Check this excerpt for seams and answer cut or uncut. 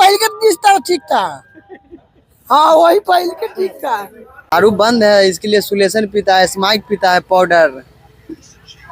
cut